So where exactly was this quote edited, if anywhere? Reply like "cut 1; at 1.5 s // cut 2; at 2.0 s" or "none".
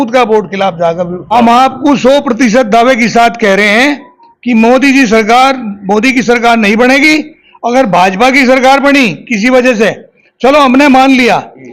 cut 1; at 1.2 s